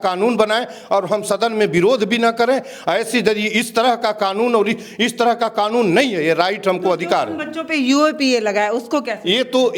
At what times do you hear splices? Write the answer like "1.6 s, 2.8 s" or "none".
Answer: none